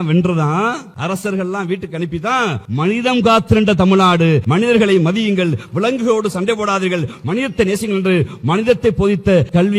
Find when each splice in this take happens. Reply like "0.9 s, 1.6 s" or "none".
none